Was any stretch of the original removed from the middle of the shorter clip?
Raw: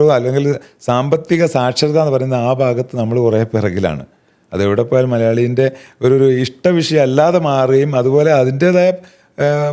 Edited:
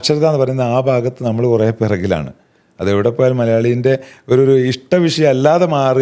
no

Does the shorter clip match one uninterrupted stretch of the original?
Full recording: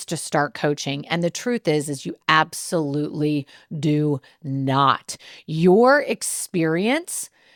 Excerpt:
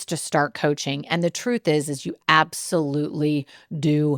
yes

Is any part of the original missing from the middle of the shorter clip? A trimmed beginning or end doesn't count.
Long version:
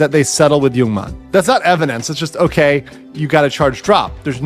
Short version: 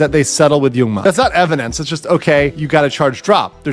yes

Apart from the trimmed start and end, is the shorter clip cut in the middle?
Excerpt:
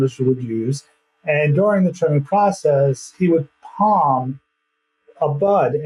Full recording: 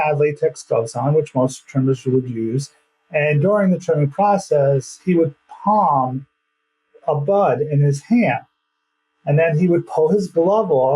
no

